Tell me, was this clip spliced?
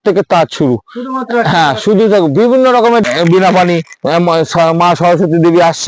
yes; 1 cut; at 3.0 s

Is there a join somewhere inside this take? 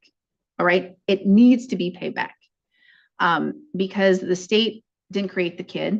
no; 0 cuts

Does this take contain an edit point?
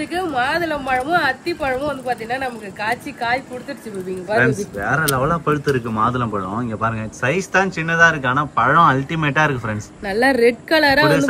no; 0 cuts

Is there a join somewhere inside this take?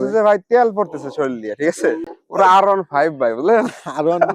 yes; 1 cut; at 2.1 s

